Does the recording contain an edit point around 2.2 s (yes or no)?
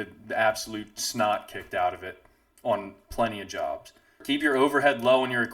no